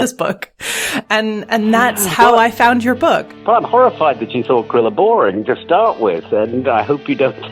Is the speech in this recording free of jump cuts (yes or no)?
no